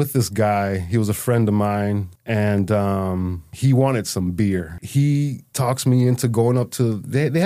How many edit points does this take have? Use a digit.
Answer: 4